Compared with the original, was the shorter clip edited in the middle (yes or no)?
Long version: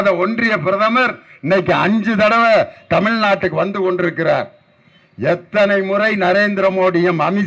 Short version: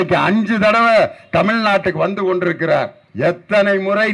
yes